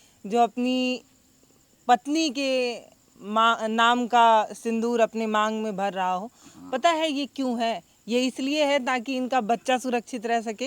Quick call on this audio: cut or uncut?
uncut